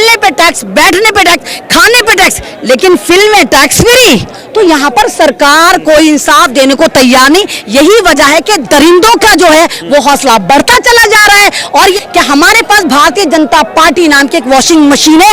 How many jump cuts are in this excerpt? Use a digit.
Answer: 2